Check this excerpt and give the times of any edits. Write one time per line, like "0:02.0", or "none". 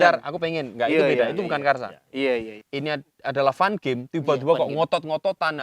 0:02.6